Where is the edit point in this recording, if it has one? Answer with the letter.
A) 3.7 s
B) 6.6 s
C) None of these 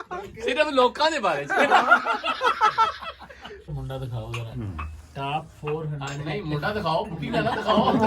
A